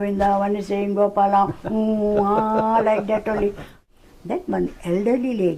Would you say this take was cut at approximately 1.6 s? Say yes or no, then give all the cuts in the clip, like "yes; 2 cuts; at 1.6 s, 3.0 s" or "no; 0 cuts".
no; 1 cut; at 3.7 s